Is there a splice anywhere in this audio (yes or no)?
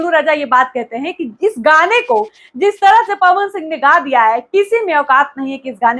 no